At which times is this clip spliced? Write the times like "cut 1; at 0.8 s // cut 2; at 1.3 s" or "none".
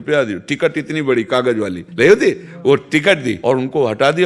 cut 1; at 1.8 s // cut 2; at 3.3 s